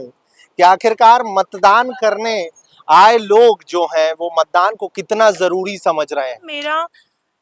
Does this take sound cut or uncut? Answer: cut